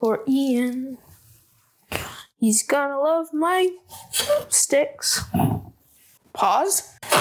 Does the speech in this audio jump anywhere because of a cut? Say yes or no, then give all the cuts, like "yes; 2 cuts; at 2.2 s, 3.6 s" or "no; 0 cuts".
no; 0 cuts